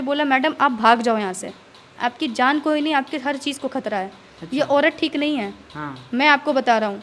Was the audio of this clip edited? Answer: no; 0 cuts

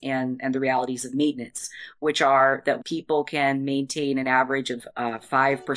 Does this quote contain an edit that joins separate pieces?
yes; 2 cuts; at 2.8 s, 4.7 s

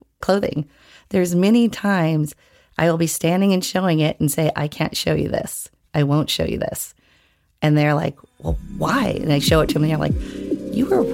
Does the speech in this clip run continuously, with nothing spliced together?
yes; 0 cuts

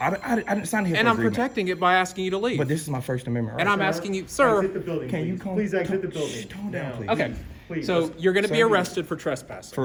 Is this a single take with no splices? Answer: yes; 0 cuts

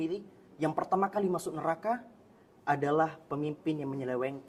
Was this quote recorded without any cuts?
yes; 0 cuts

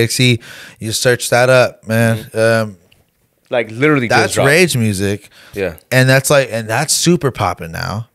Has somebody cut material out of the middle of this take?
no; 0 cuts

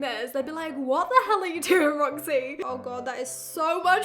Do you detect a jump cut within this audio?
yes; 1 cut; at 2.6 s

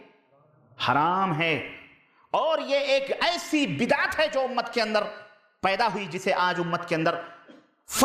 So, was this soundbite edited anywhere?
no; 0 cuts

